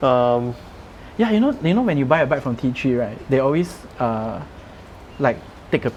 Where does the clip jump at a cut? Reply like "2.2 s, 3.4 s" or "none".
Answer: none